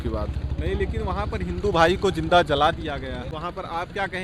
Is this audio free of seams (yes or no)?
no